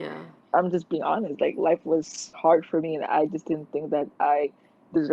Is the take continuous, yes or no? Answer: no